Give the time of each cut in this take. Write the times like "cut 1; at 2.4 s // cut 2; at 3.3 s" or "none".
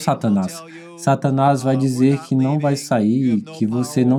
none